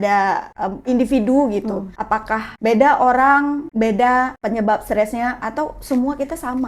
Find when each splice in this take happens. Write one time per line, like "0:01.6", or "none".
0:00.8
0:02.2
0:03.6
0:04.4